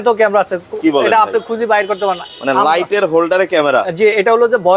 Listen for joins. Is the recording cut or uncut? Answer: uncut